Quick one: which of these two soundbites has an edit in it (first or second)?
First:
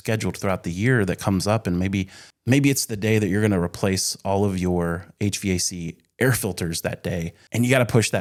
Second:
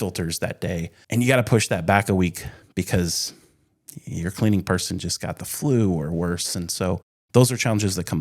second